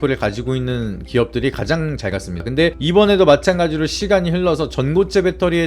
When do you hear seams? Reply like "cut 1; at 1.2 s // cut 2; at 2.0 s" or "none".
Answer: cut 1; at 2.4 s